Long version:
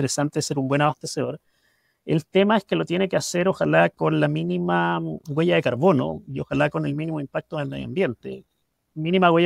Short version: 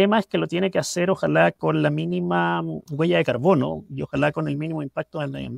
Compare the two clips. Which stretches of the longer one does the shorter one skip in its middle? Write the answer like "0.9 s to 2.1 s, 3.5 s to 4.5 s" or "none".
none